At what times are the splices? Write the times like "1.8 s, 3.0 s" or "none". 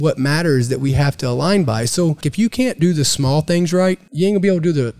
2.3 s, 4.1 s